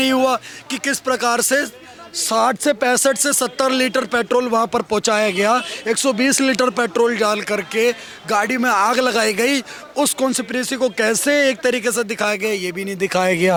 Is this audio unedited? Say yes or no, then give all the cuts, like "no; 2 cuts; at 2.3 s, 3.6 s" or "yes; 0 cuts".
yes; 0 cuts